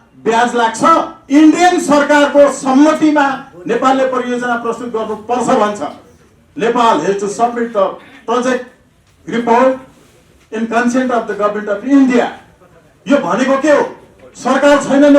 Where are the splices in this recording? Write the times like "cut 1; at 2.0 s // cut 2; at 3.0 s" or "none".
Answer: cut 1; at 1.2 s